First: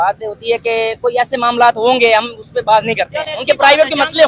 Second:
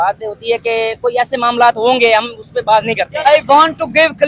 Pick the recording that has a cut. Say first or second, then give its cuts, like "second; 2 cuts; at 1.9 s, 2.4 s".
second; 1 cut; at 3.2 s